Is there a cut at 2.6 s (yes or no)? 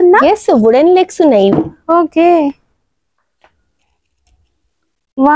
no